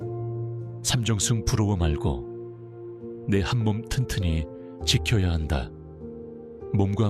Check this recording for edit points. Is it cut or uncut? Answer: cut